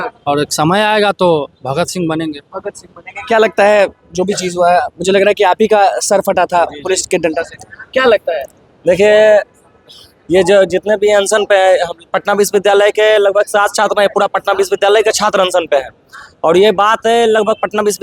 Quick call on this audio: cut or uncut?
uncut